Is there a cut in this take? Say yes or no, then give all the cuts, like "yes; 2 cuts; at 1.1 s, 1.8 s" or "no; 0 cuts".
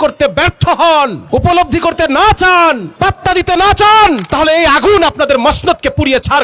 yes; 3 cuts; at 1.2 s, 2.9 s, 4.3 s